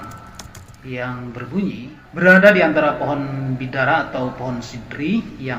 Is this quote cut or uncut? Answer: cut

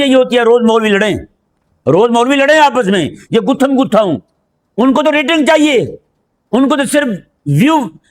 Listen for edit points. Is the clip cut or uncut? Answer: uncut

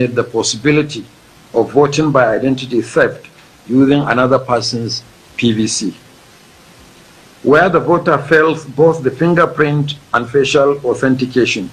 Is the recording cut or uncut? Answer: uncut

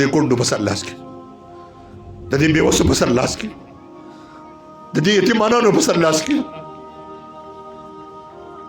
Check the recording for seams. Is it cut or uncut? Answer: cut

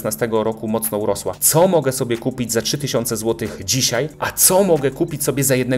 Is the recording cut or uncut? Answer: cut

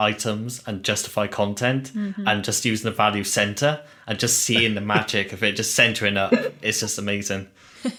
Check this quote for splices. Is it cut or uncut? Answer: uncut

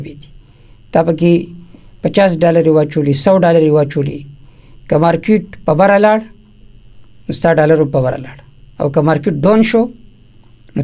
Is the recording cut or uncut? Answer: uncut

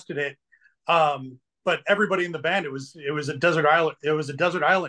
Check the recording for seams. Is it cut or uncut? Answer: uncut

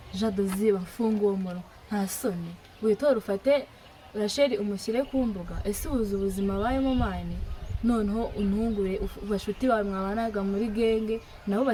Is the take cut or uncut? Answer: uncut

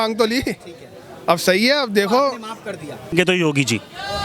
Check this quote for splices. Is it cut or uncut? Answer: cut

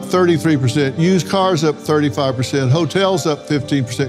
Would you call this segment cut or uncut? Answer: uncut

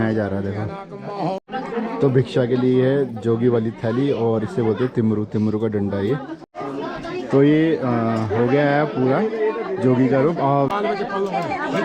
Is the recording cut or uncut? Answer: cut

